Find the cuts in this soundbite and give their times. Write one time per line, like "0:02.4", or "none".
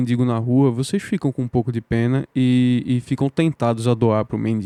none